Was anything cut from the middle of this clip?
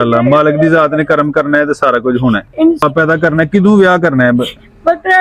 yes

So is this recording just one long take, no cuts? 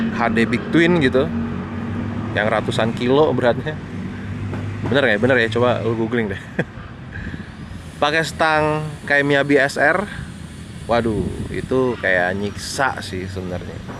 yes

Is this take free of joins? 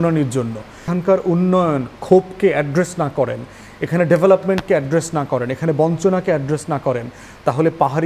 no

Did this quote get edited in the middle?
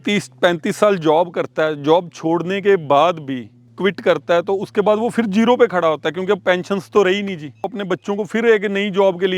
yes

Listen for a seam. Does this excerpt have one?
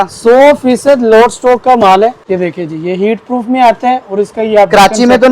yes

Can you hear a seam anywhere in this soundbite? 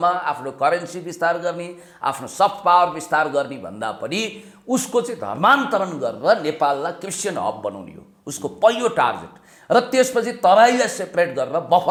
no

